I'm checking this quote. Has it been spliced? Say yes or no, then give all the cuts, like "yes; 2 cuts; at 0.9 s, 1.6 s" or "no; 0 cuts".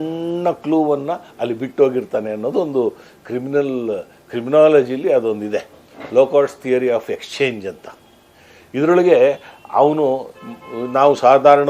no; 0 cuts